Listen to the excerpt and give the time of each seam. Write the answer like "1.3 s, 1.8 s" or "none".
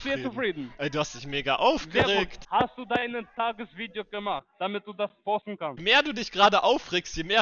2.4 s, 5.7 s